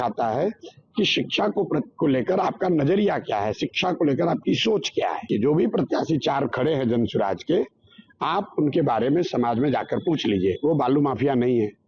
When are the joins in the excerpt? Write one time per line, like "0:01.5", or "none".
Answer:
0:05.3